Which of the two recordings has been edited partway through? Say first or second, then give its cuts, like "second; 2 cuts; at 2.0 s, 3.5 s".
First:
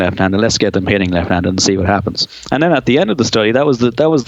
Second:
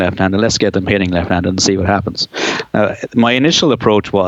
first; 1 cut; at 2.3 s